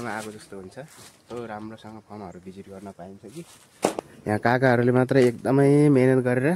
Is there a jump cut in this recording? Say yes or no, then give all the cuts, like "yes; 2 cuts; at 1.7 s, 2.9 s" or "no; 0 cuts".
yes; 1 cut; at 4.1 s